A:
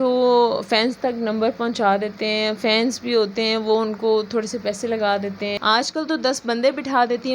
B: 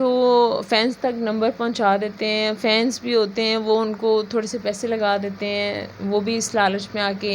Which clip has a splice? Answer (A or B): A